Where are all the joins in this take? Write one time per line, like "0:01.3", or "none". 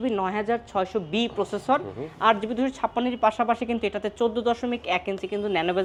none